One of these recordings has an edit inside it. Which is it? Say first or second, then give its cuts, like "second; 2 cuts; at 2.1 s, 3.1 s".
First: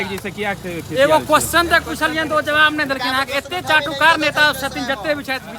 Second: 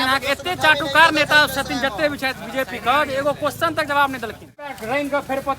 second; 1 cut; at 4.7 s